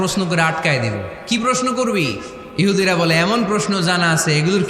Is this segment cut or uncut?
cut